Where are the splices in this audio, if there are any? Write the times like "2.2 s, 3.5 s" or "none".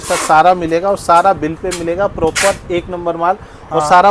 none